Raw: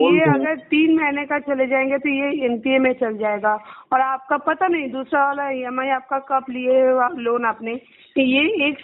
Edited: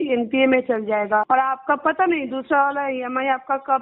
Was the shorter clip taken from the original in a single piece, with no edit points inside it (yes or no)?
no